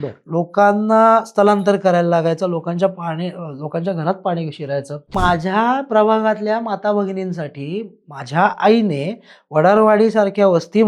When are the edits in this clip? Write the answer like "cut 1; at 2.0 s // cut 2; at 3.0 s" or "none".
cut 1; at 5.1 s